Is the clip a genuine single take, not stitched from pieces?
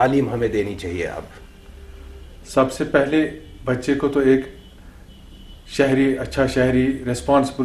yes; 0 cuts

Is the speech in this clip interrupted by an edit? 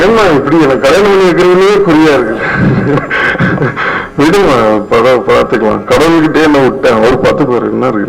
no; 0 cuts

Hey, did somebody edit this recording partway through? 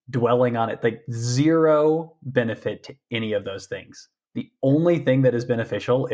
no; 0 cuts

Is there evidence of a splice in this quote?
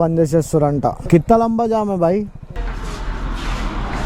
yes; 1 cut; at 2.6 s

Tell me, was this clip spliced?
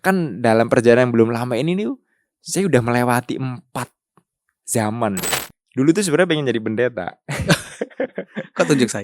yes; 1 cut; at 5.4 s

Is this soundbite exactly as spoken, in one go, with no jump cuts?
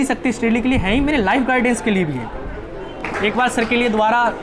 no; 1 cut; at 3.0 s

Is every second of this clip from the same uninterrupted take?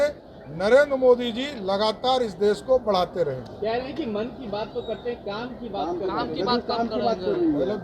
yes; 0 cuts

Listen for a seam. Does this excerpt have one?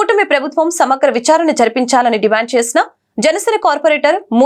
no; 0 cuts

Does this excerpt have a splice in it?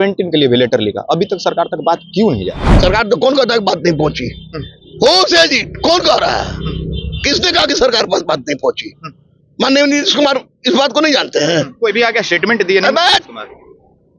no; 0 cuts

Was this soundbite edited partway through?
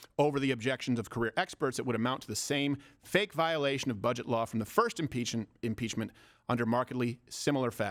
no; 0 cuts

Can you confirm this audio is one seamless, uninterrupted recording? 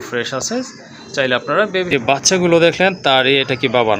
no; 1 cut; at 1.9 s

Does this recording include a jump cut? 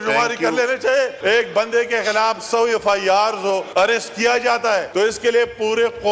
yes; 3 cuts; at 1.2 s, 3.7 s, 4.9 s

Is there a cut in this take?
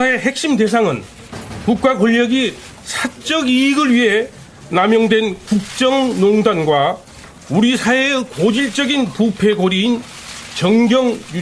no; 0 cuts

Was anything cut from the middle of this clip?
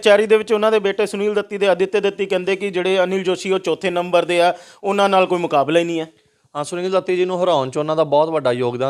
no; 0 cuts

